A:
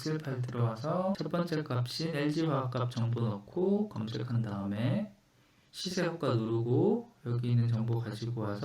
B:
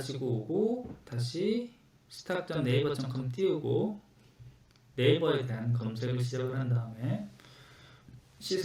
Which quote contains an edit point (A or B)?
A